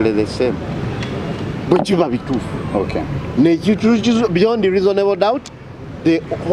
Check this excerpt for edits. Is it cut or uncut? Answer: uncut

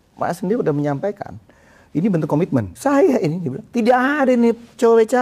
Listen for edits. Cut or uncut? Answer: cut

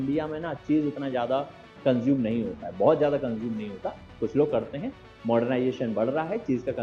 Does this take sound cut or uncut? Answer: uncut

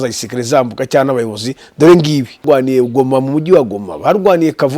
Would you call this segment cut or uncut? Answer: cut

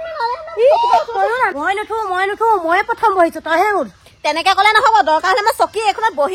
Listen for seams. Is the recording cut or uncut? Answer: cut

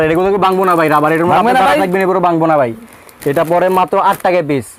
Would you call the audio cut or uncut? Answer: uncut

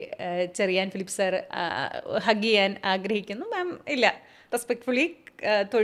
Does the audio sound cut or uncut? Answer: uncut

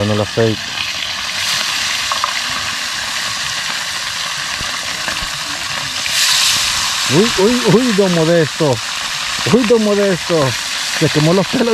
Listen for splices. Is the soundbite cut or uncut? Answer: uncut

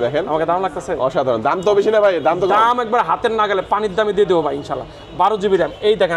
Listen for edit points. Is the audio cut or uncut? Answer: uncut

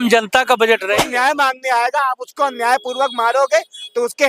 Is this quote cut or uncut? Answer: cut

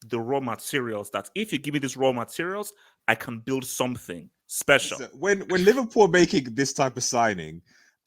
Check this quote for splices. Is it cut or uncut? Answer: cut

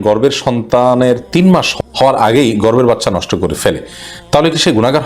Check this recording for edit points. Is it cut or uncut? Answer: cut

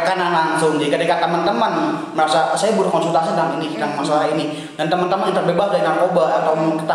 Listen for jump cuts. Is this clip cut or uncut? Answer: uncut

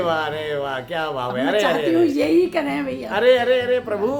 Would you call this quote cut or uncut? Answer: uncut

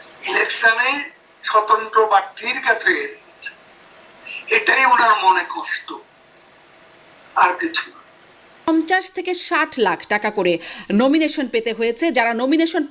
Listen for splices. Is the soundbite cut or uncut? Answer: cut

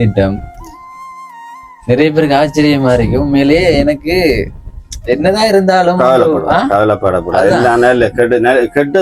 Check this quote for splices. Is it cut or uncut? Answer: uncut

